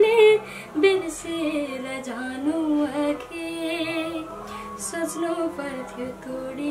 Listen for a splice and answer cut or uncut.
uncut